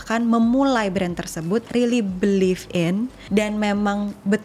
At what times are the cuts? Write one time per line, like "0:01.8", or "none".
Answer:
0:03.2